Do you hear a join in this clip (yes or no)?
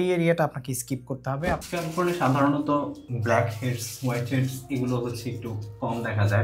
yes